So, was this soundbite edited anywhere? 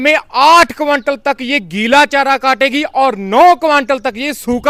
no; 0 cuts

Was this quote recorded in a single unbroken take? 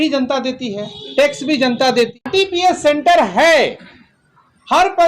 no; 1 cut; at 2.3 s

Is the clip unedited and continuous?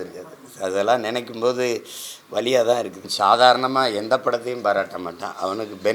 no; 1 cut; at 3.1 s

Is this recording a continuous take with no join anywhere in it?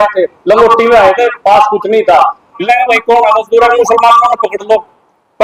no; 1 cut; at 2.6 s

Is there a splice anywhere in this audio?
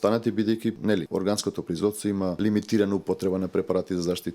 yes; 2 cuts; at 1.0 s, 2.4 s

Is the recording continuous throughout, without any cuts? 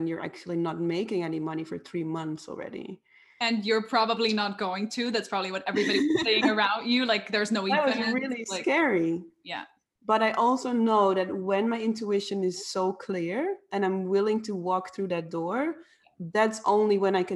yes; 0 cuts

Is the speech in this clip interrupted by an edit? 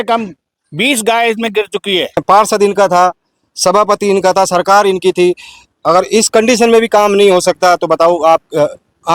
yes; 1 cut; at 2.2 s

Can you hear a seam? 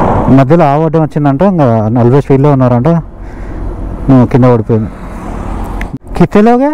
yes; 1 cut; at 5.8 s

